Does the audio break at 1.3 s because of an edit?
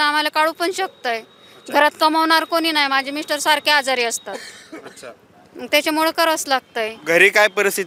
no; 0 cuts

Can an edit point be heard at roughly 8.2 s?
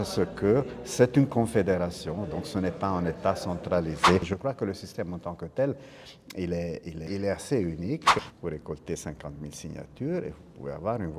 yes; 3 cuts; at 4.2 s, 7.0 s, 8.2 s

